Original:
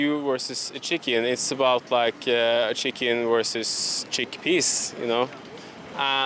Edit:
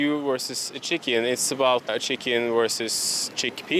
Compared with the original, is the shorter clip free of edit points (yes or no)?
no